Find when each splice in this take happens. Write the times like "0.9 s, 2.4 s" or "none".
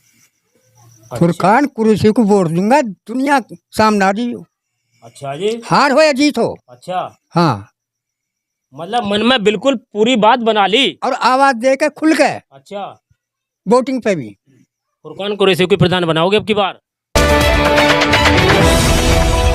17.1 s

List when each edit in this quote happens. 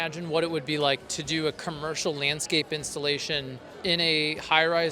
3.6 s

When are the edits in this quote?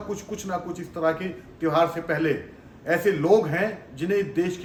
none

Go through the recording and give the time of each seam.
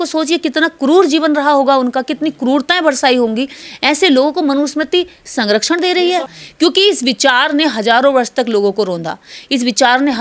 6.4 s

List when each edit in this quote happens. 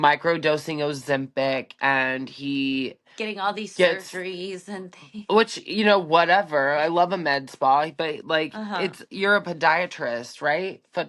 none

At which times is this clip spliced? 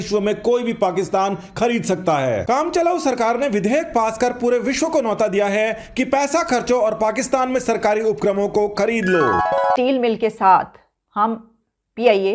9.4 s

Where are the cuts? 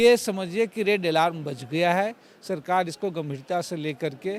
none

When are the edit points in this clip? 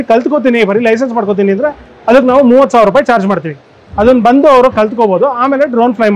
none

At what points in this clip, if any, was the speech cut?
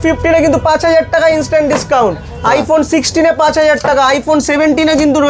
none

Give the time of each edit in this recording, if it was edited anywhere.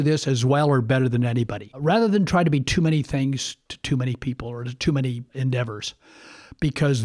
1.8 s, 5.3 s

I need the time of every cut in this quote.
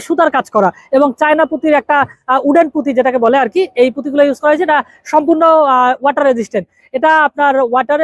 none

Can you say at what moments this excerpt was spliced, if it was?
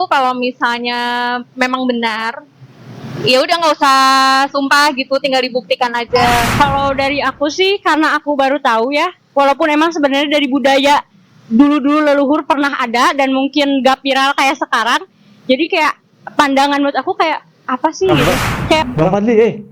6.5 s, 18.8 s

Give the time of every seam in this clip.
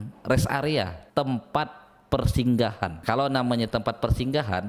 1.0 s, 3.0 s

